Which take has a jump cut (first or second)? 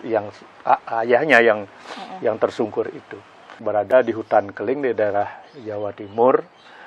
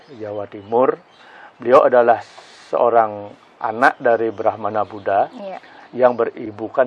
first